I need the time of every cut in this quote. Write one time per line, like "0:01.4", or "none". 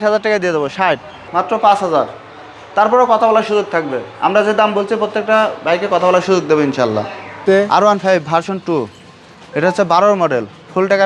0:01.2
0:07.4